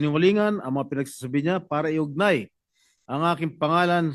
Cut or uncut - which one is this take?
uncut